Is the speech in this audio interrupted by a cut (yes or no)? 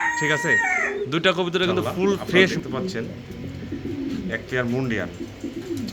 yes